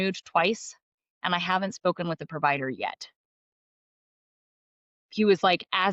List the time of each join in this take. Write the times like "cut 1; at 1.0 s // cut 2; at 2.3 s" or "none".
none